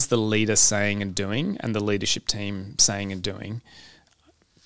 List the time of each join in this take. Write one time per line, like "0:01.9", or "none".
none